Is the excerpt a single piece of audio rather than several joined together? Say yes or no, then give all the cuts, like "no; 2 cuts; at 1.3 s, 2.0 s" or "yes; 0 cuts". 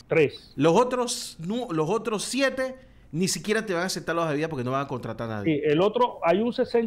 yes; 0 cuts